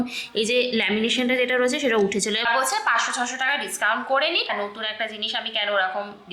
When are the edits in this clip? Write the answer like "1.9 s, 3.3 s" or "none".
2.4 s, 4.5 s